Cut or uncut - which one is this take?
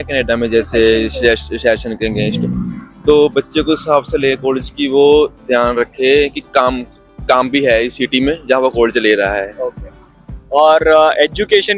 uncut